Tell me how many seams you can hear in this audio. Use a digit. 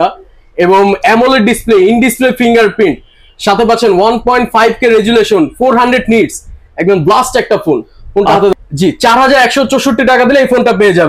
1